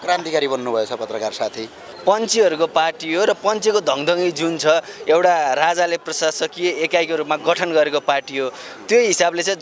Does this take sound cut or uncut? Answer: cut